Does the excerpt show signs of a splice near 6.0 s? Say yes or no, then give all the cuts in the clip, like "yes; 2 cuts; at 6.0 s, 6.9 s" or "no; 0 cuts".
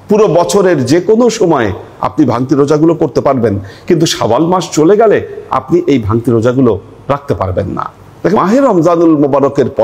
no; 1 cut; at 8.4 s